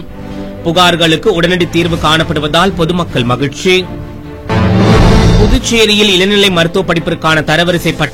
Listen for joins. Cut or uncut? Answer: uncut